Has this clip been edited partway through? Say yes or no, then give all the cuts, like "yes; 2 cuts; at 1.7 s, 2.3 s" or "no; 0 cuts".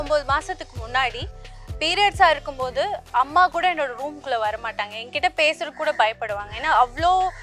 no; 0 cuts